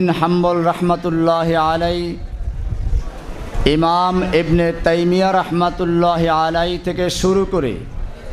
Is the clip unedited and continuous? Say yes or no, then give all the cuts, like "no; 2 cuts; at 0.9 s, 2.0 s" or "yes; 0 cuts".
yes; 0 cuts